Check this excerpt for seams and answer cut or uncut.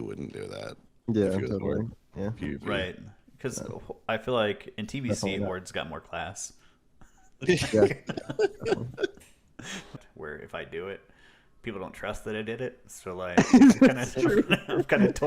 cut